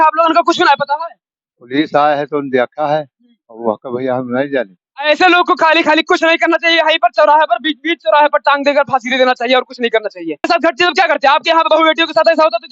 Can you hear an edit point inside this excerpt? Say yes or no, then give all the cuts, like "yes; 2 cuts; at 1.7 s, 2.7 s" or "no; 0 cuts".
yes; 1 cut; at 10.4 s